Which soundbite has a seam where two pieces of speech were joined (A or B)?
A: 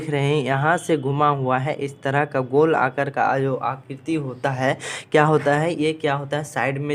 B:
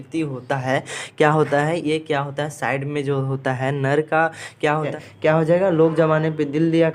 B